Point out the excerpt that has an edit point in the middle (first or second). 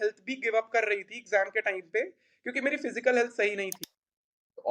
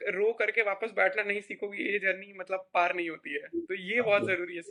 first